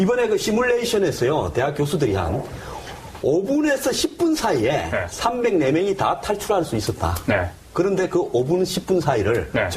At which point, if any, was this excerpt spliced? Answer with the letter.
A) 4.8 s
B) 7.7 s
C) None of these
A